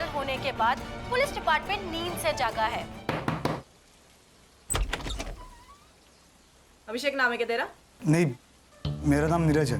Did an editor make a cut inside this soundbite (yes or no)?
yes